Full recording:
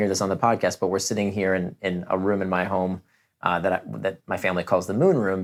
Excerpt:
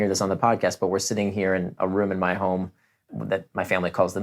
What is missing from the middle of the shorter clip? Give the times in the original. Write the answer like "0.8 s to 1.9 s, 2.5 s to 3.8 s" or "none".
1.7 s to 2.0 s, 3.4 s to 3.8 s